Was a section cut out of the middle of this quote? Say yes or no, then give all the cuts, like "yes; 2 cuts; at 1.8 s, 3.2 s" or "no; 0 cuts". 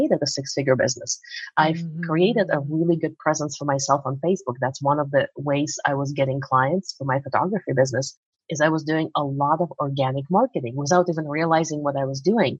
no; 0 cuts